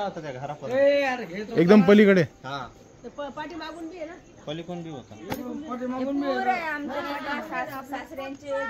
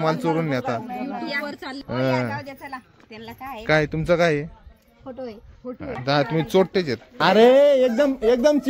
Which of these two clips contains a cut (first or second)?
second